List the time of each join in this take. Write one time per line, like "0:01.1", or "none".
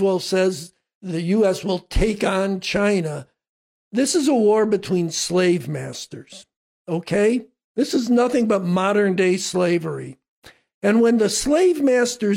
0:00.9